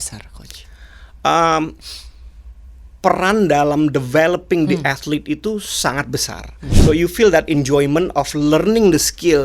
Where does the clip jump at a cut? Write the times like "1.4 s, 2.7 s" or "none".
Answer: 6.7 s